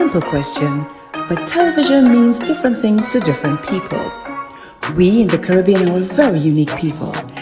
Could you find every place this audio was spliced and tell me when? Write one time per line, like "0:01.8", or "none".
none